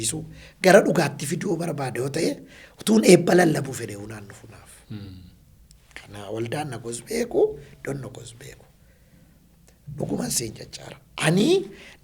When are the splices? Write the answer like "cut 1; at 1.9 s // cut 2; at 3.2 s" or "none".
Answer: none